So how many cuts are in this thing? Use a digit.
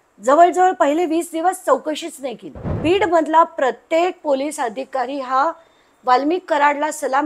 1